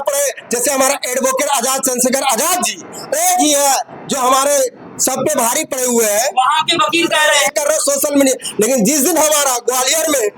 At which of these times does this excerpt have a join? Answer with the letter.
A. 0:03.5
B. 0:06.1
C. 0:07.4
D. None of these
C